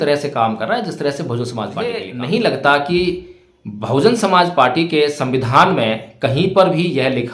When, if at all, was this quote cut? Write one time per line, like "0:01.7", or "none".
0:02.1